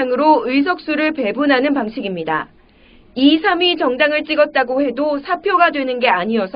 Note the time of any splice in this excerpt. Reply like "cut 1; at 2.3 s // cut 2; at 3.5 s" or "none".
none